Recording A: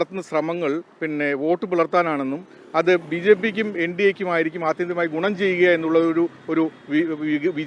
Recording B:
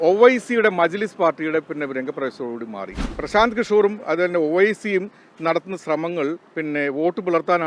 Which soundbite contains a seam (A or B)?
B